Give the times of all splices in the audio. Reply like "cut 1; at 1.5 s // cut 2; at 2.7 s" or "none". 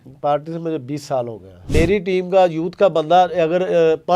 cut 1; at 1.7 s